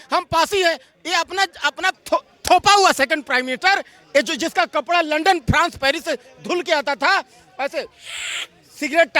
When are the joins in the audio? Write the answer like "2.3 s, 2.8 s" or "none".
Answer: 2.0 s